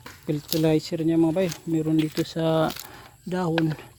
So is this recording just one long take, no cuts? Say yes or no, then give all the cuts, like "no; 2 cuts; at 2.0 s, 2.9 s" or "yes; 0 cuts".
yes; 0 cuts